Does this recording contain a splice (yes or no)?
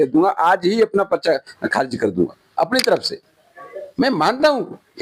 no